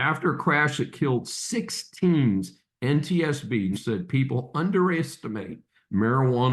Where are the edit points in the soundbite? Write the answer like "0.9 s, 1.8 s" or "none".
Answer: 3.8 s

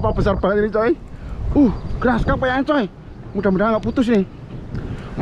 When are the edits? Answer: none

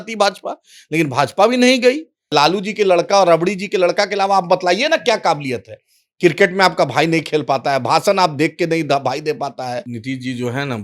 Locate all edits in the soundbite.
2.3 s, 9.9 s

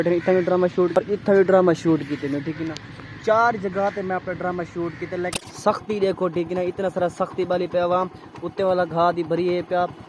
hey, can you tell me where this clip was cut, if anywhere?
1.4 s, 5.3 s

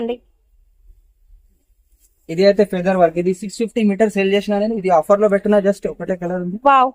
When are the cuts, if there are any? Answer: none

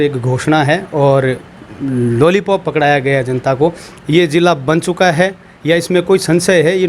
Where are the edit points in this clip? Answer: 3.9 s

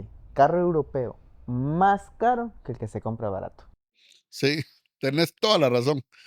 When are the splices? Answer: none

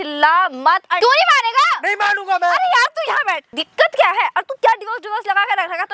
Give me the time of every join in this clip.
1.0 s, 3.6 s

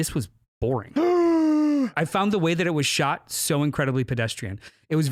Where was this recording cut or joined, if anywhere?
1.9 s

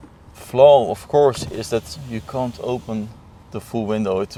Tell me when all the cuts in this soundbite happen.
none

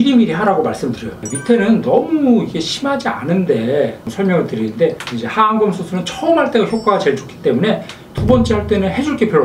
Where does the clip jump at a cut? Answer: 1.2 s, 4.0 s, 8.0 s

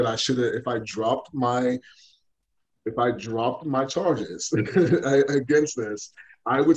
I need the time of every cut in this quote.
none

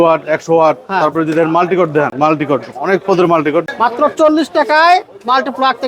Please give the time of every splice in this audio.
2.1 s, 3.7 s

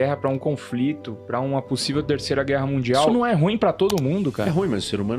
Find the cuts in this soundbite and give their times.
3.1 s, 4.4 s

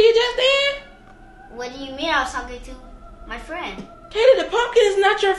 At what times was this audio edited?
4.0 s

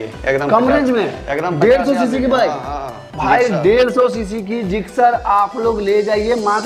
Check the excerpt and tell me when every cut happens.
none

